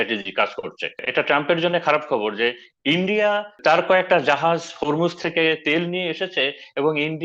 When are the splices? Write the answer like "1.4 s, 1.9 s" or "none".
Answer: 1.0 s, 3.6 s